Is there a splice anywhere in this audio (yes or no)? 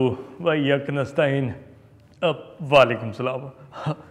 no